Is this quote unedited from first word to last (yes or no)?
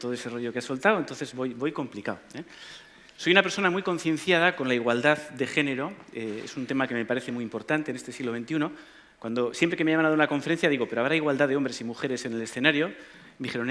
no